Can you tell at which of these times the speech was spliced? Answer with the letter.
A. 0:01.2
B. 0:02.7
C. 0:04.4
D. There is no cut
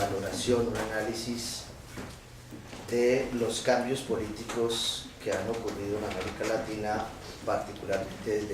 B